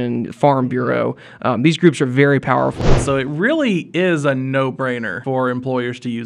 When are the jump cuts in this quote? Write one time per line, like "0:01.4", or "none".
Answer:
0:02.8
0:05.1